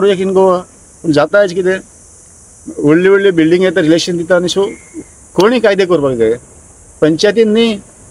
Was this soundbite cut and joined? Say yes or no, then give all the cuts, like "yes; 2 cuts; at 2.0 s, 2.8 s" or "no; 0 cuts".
no; 0 cuts